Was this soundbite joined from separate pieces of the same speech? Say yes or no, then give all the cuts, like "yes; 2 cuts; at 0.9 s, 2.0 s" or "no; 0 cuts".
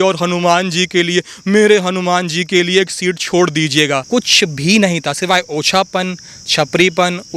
yes; 1 cut; at 4.0 s